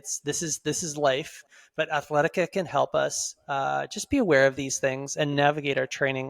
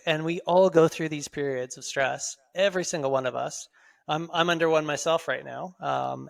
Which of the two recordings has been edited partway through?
first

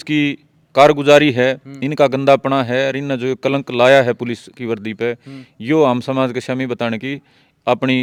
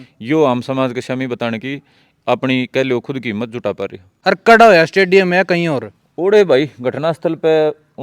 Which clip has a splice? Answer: second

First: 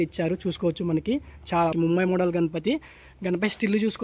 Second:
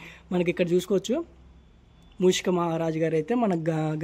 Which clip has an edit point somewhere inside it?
first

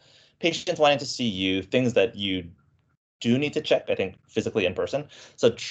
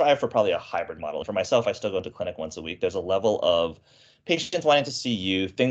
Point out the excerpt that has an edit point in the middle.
second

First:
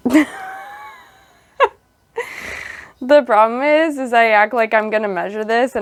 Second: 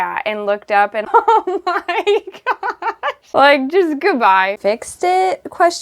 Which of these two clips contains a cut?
second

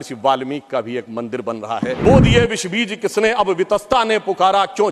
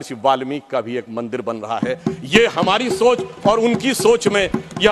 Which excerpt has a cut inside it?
first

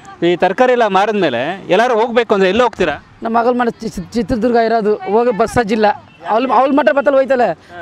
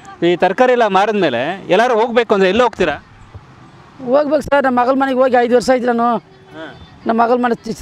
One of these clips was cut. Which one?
first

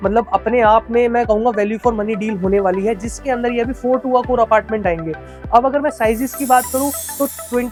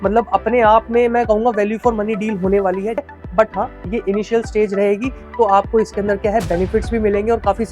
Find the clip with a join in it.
second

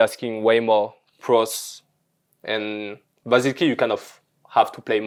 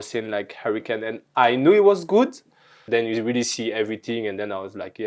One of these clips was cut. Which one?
second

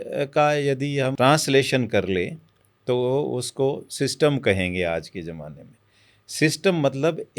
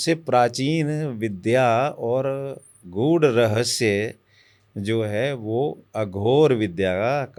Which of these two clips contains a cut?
first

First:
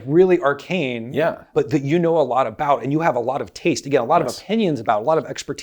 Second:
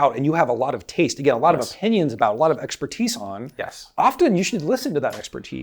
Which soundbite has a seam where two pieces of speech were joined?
first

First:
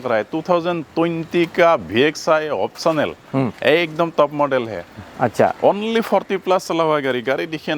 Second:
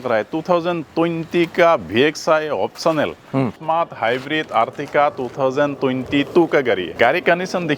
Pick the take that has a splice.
second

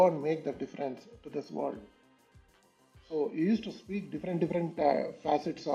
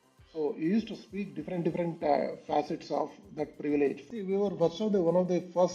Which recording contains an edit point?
second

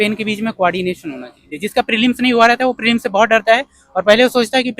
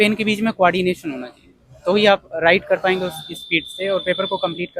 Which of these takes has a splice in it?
first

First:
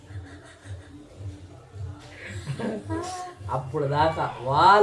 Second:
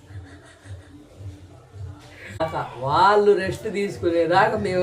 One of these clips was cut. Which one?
second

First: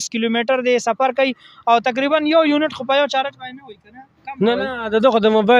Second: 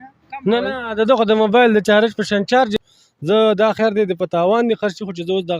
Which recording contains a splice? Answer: second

